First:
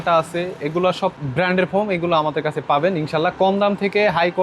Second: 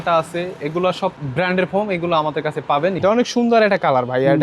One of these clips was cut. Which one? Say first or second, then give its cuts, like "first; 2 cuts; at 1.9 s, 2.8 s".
second; 1 cut; at 3.0 s